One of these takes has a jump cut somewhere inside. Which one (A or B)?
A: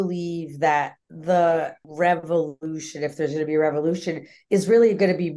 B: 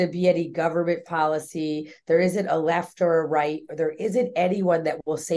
A